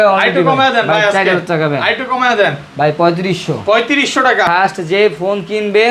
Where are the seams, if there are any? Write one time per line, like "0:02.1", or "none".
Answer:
0:04.5